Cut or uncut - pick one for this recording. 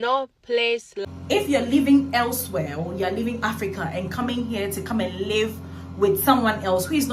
cut